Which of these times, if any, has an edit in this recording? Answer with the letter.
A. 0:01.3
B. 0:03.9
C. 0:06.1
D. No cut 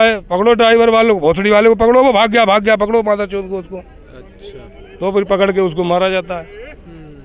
D